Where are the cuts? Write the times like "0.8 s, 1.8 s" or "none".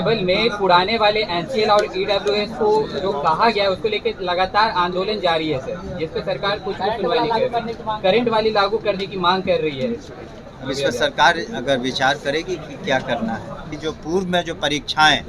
13.7 s